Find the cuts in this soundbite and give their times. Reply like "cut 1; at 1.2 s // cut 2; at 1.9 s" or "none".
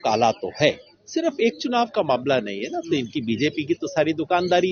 cut 1; at 0.9 s

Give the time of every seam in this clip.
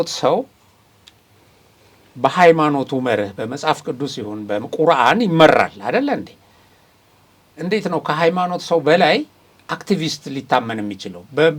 none

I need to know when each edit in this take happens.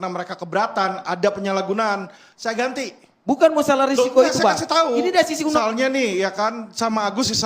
cut 1; at 5.6 s

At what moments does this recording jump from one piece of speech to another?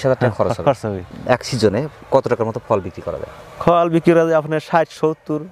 none

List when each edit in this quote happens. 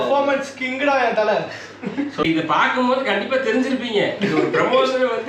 cut 1; at 2.1 s

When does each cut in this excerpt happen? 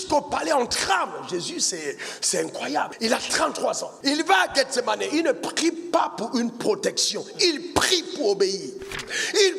cut 1; at 2.9 s // cut 2; at 3.9 s

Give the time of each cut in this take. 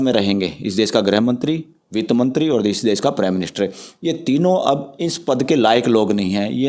none

